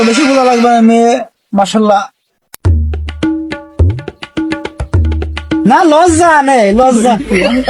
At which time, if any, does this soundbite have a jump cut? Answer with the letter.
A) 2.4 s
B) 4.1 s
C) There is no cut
C